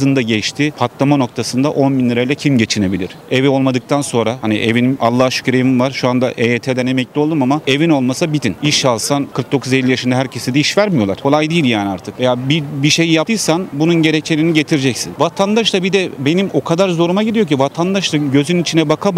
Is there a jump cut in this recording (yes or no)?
no